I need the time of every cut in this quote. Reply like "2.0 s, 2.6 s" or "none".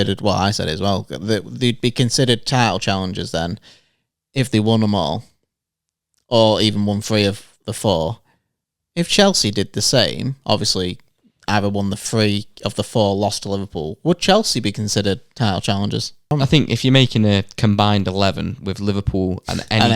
16.3 s